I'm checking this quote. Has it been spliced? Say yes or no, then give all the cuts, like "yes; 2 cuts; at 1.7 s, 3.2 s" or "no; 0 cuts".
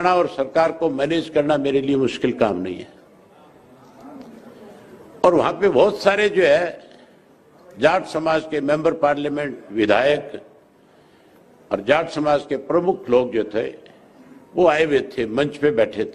no; 0 cuts